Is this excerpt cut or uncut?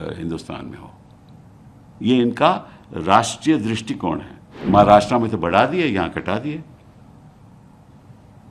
cut